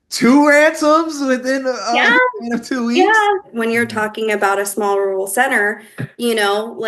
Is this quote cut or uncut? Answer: cut